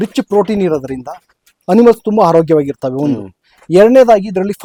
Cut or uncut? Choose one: uncut